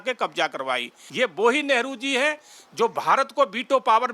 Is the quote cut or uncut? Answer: cut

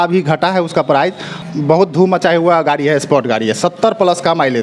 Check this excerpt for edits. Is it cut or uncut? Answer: uncut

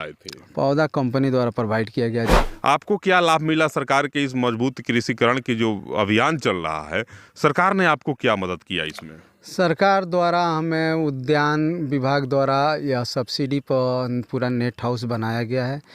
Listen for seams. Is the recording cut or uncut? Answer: cut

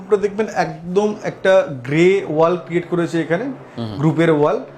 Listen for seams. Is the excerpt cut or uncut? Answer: uncut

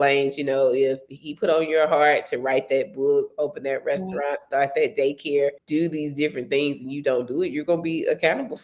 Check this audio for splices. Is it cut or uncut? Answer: cut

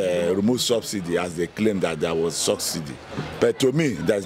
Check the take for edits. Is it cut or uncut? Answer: uncut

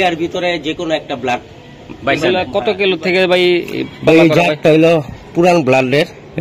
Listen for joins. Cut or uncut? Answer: cut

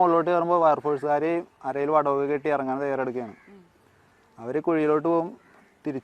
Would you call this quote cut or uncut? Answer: uncut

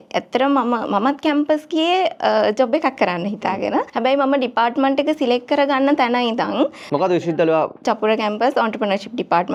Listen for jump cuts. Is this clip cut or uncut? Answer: uncut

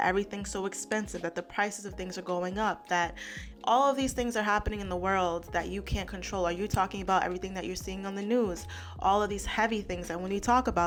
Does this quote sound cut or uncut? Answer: uncut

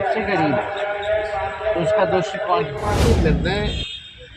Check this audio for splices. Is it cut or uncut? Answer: cut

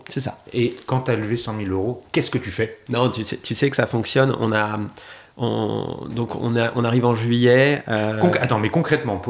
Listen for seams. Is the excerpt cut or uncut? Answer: cut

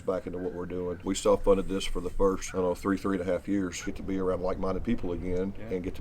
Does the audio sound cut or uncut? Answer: cut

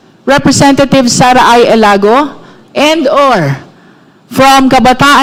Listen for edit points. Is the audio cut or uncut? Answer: uncut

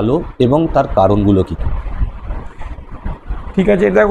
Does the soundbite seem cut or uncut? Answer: uncut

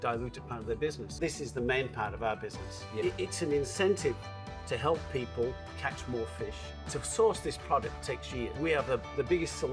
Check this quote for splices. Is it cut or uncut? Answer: cut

